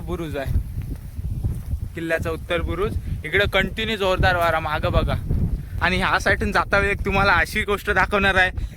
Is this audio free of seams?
no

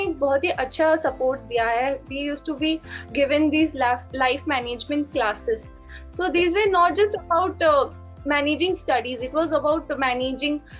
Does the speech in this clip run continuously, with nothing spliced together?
yes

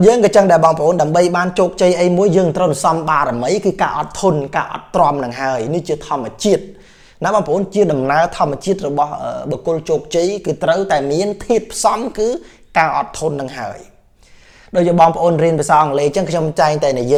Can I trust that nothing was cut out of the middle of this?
yes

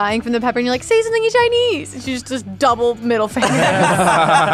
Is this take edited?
no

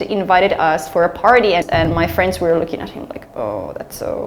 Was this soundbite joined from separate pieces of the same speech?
yes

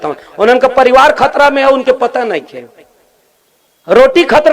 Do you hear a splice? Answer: no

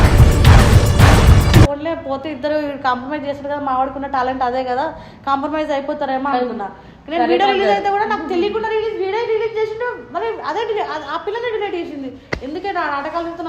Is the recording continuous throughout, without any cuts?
no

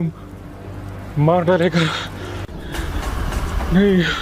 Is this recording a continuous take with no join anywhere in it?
yes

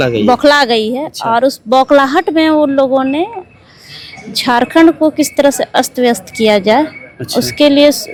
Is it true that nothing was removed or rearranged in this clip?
yes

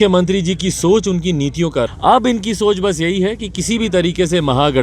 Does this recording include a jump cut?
yes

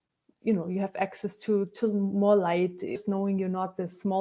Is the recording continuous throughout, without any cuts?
no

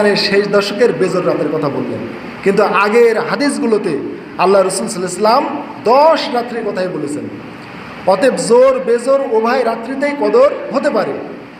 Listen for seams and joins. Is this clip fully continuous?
yes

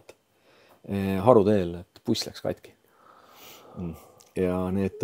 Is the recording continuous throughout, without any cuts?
yes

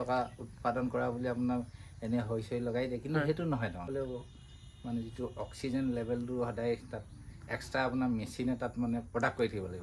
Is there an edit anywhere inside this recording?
yes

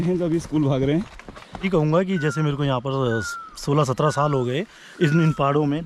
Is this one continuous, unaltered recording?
no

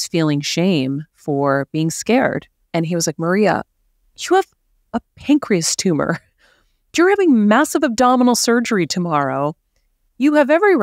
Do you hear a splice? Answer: yes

